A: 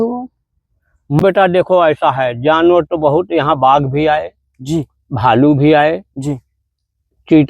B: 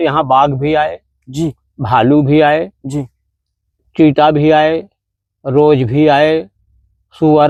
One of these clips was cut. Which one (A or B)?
A